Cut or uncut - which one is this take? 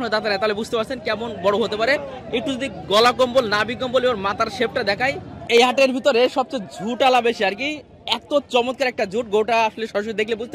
cut